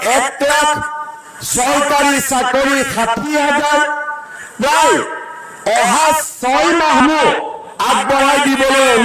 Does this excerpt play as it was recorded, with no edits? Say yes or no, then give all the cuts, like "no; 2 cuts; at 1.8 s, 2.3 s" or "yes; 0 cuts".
no; 1 cut; at 7.0 s